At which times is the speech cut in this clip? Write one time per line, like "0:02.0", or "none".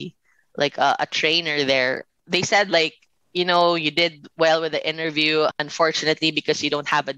0:02.1
0:05.6